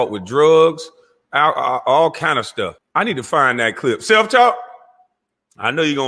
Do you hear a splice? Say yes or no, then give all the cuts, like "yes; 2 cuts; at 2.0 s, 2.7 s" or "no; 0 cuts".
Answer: yes; 1 cut; at 2.8 s